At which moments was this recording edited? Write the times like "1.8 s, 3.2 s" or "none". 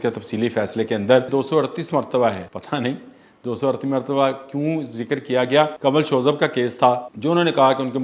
1.3 s, 2.5 s, 5.8 s, 7.1 s